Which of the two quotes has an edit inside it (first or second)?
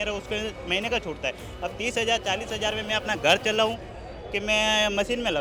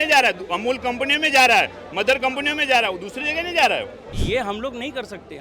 second